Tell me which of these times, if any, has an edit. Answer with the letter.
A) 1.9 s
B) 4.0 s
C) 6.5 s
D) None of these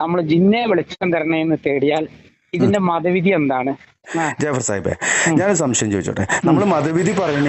B